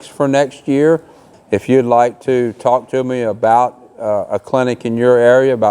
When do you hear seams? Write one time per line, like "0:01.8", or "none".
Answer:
0:01.3